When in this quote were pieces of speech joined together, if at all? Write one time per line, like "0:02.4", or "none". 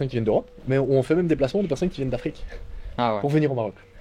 none